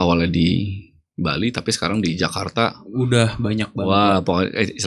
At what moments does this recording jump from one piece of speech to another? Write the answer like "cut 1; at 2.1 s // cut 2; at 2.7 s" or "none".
none